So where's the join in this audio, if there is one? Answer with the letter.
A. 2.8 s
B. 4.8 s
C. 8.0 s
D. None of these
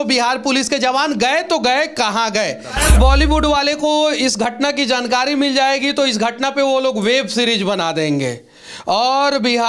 A